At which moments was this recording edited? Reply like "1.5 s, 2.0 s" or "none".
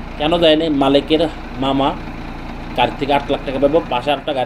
none